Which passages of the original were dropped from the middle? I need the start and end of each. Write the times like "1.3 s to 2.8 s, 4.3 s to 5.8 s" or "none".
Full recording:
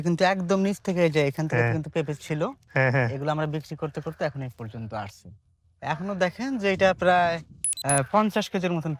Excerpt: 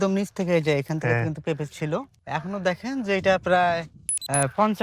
2.6 s to 5.7 s